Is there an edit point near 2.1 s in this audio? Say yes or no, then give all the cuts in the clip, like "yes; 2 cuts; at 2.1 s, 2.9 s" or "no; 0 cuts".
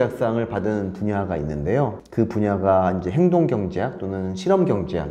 no; 0 cuts